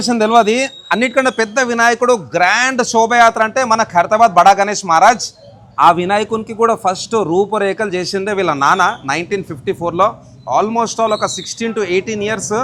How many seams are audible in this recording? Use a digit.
0